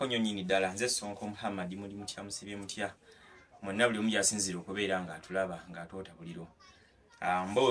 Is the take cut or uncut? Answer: uncut